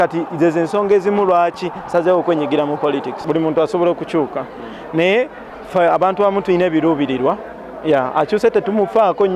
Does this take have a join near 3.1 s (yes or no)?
yes